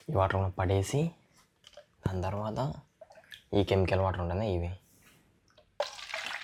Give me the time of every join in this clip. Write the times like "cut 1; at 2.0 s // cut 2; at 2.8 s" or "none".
none